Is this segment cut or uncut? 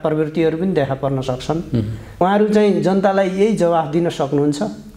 cut